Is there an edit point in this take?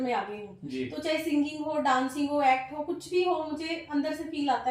no; 0 cuts

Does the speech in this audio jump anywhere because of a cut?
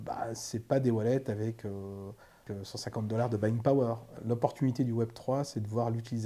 yes; 2 cuts; at 2.4 s, 4.2 s

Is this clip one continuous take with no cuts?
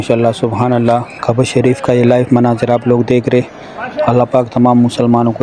yes; 0 cuts

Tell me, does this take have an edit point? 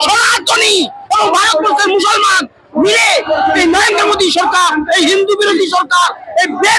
no; 0 cuts

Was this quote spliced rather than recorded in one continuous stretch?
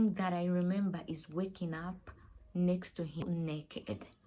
yes; 1 cut; at 3.2 s

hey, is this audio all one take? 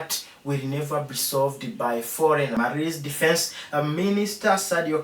no; 1 cut; at 2.6 s

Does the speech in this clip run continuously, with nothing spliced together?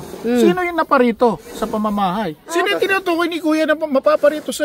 no; 1 cut; at 2.4 s

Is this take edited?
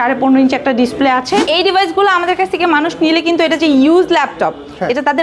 yes; 1 cut; at 1.5 s

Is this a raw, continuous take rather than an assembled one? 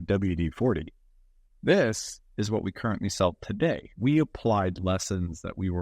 no; 1 cut; at 3.9 s

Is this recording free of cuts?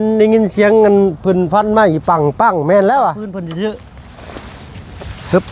no; 1 cut; at 3.3 s

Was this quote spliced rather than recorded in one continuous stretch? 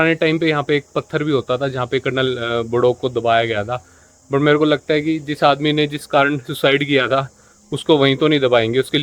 no; 0 cuts

